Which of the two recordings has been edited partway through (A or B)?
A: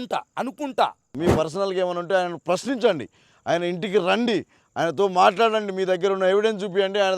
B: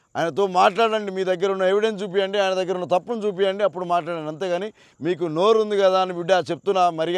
A